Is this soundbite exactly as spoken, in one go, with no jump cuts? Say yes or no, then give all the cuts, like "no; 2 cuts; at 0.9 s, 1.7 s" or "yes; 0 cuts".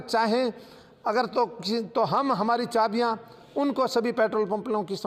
yes; 0 cuts